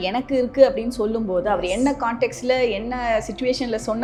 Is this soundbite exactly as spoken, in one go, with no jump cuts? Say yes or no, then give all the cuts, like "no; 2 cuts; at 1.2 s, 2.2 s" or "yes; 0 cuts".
yes; 0 cuts